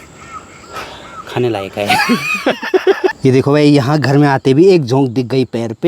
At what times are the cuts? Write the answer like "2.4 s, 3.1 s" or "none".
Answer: 3.1 s